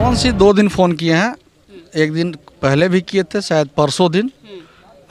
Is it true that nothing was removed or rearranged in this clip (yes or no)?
yes